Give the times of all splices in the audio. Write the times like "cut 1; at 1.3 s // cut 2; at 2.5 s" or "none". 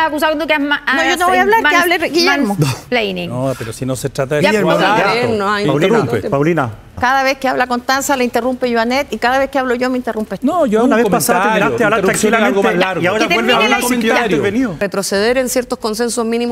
cut 1; at 7.0 s // cut 2; at 14.8 s